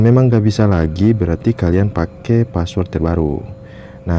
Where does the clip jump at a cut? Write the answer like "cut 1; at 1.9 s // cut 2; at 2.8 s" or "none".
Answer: none